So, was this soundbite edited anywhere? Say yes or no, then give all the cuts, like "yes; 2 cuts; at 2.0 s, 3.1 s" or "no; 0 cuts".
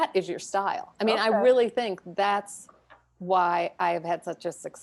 no; 0 cuts